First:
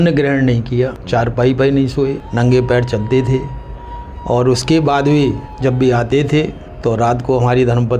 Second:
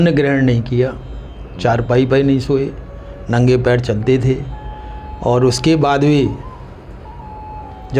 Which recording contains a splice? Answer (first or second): first